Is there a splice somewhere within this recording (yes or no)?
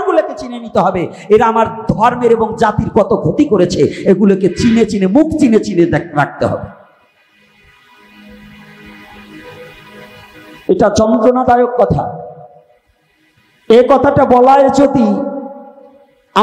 no